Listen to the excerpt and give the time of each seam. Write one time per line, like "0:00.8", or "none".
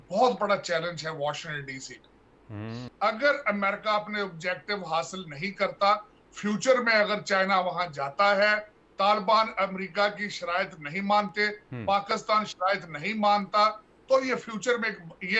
0:02.8